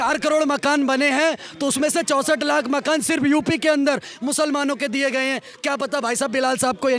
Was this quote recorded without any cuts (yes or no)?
yes